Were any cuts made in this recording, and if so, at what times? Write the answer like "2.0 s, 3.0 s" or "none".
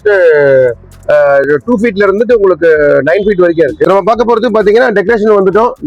3.9 s